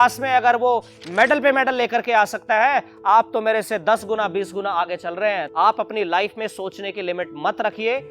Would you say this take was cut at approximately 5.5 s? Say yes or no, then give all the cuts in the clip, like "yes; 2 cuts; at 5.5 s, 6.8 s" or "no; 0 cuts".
yes; 1 cut; at 5.5 s